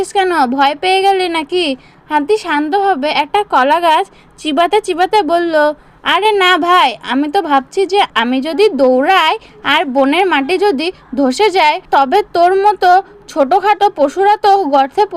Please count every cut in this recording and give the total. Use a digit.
2